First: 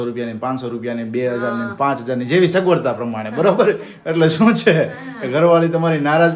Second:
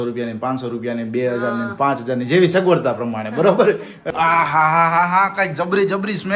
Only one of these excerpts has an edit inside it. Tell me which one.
second; 1 cut; at 4.1 s

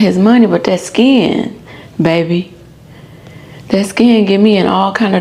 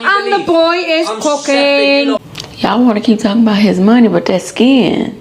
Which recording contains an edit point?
second; 1 cut; at 2.4 s

